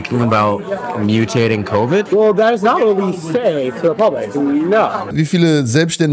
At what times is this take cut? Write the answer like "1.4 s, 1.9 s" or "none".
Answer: 2.1 s, 5.1 s